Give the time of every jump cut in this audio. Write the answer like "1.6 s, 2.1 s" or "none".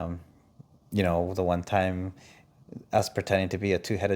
none